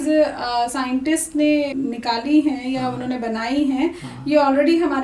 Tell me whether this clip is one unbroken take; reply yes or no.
yes